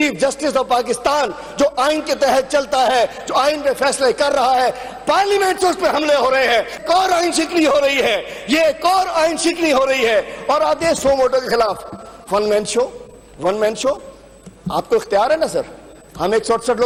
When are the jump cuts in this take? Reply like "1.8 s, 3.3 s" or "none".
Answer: none